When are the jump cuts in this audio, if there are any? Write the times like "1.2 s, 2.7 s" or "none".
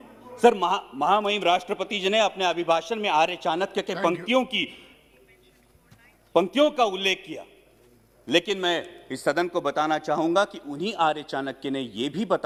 none

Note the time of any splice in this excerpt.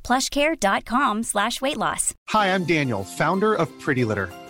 2.2 s

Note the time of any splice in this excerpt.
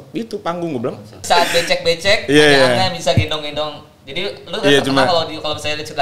1.2 s

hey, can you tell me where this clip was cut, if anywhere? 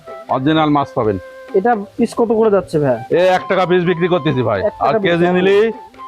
none

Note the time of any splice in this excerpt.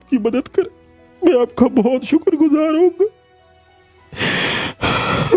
none

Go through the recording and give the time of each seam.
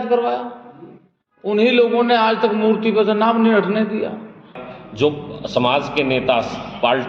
4.6 s

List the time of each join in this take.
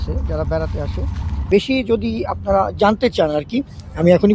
1.3 s

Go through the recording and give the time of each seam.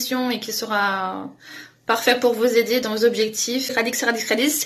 3.7 s

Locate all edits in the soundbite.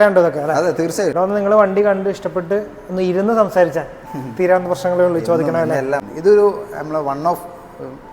1.1 s, 6.1 s

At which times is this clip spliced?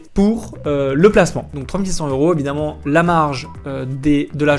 none

